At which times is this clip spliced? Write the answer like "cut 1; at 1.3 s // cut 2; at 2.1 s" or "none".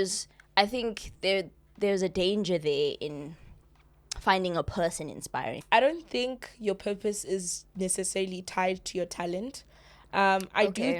cut 1; at 5.5 s